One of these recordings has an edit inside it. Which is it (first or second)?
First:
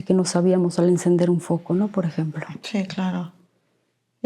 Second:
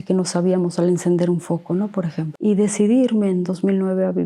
second